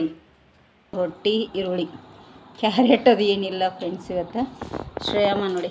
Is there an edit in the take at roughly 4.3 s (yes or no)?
no